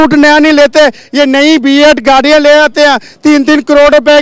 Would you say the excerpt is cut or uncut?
uncut